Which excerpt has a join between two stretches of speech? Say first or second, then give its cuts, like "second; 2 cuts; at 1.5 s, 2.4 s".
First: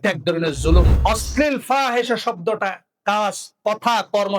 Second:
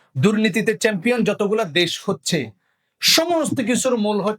first; 1 cut; at 0.9 s